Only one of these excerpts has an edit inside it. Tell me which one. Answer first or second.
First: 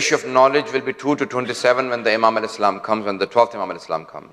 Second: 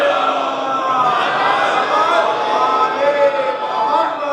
first